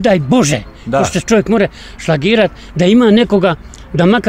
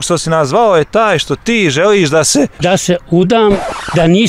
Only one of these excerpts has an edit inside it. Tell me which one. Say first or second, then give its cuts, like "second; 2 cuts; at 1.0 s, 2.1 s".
second; 1 cut; at 2.6 s